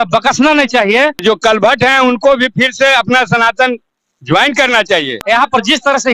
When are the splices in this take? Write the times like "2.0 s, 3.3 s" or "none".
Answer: 1.2 s, 5.1 s

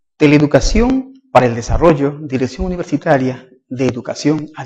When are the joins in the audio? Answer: none

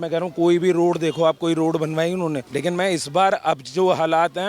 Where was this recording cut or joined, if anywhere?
2.5 s

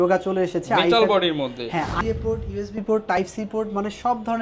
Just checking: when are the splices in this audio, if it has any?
1.9 s

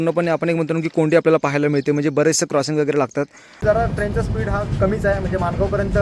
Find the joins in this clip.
3.6 s

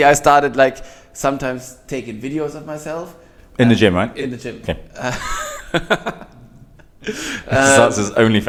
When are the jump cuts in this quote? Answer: none

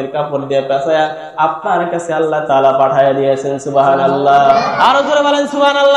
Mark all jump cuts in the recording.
4.6 s

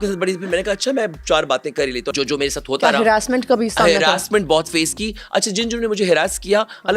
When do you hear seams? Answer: 2.1 s

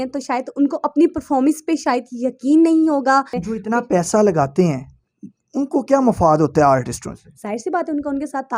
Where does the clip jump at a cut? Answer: 3.4 s

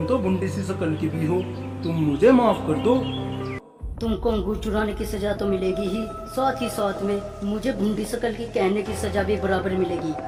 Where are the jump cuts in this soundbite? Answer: none

